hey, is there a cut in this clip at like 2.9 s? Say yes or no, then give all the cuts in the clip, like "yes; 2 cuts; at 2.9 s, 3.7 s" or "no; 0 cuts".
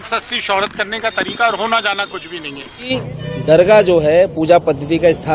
yes; 1 cut; at 2.9 s